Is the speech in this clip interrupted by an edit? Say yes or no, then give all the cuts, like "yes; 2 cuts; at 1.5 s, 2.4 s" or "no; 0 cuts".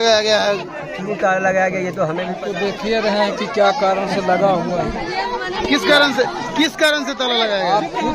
yes; 1 cut; at 2.4 s